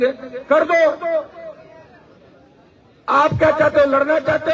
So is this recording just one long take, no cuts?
yes; 0 cuts

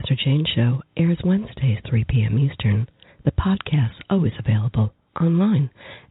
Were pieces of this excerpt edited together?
no; 0 cuts

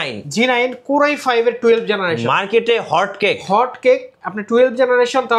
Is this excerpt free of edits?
yes; 0 cuts

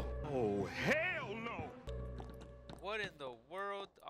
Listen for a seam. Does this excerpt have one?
no; 0 cuts

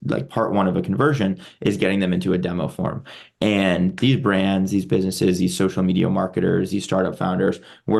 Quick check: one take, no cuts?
yes; 0 cuts

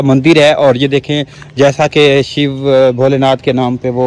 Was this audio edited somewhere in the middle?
no; 0 cuts

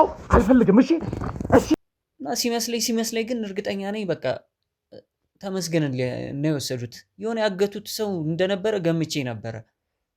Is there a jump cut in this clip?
yes; 1 cut; at 1.7 s

